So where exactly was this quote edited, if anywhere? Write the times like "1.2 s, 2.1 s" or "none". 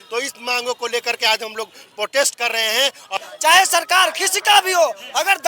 3.1 s